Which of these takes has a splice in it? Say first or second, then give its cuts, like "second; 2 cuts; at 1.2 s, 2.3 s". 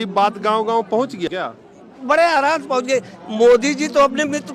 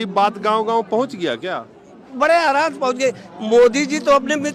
first; 1 cut; at 1.3 s